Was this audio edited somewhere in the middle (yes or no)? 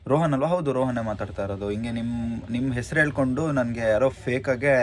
no